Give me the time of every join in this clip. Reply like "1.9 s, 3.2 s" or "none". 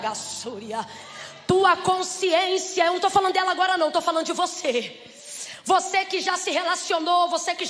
none